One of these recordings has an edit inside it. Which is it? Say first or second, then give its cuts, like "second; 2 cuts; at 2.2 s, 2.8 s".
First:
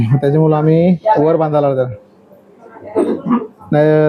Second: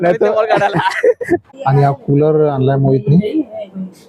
second; 1 cut; at 1.5 s